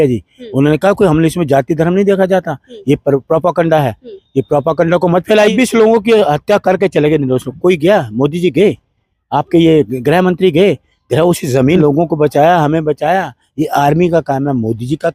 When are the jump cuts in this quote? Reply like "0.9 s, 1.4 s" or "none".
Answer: 5.5 s, 11.8 s